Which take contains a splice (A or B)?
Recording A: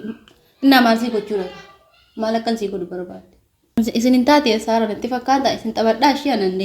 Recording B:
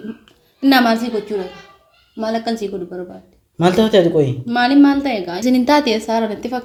A